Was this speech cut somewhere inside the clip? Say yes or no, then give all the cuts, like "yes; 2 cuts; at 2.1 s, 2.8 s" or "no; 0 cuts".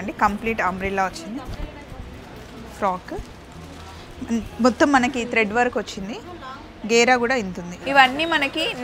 yes; 1 cut; at 7.7 s